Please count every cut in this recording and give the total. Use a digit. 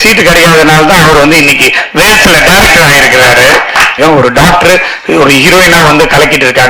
1